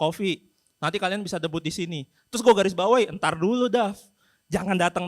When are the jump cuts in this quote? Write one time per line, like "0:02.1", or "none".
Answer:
none